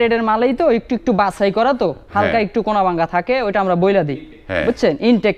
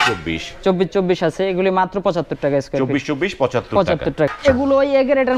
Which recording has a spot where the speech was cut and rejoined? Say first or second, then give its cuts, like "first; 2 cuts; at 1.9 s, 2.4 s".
second; 1 cut; at 4.3 s